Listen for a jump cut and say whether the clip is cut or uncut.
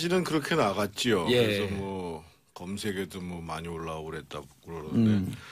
uncut